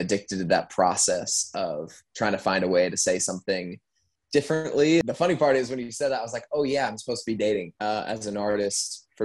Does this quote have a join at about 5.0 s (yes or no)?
yes